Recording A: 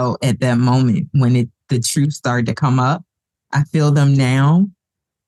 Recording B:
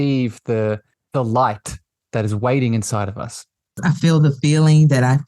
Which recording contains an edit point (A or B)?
B